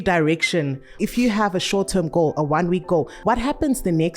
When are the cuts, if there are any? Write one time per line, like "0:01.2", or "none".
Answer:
0:01.0
0:03.1